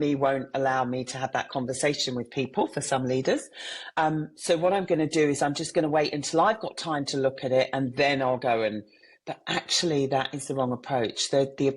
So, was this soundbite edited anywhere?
no; 0 cuts

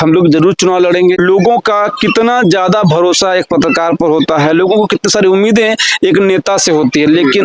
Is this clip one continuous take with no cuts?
no; 1 cut; at 1.2 s

